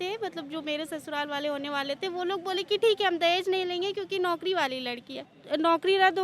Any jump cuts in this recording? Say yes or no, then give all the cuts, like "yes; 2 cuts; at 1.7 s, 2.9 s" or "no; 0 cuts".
yes; 1 cut; at 5.3 s